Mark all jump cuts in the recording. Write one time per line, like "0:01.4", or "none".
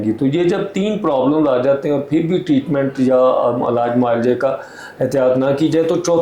none